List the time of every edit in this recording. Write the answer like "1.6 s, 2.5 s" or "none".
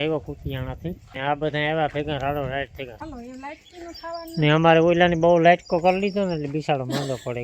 1.1 s, 2.9 s